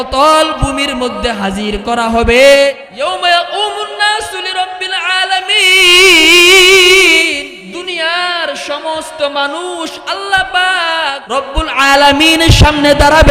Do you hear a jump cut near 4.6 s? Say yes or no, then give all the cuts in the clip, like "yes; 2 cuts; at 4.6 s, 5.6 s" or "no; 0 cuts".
no; 3 cuts; at 2.9 s, 7.5 s, 11.2 s